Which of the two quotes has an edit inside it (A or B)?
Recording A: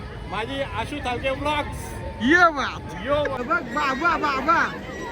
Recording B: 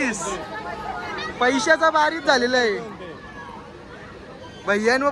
A